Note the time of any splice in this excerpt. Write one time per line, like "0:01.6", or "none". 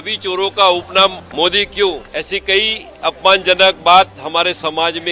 0:01.2
0:02.0